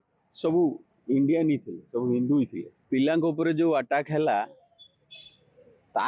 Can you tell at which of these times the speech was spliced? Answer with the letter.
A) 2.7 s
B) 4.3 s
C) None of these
A